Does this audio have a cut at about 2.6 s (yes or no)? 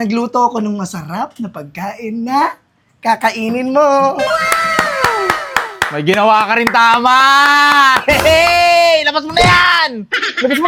no